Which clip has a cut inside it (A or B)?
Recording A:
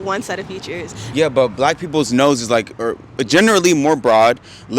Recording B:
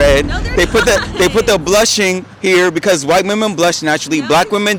A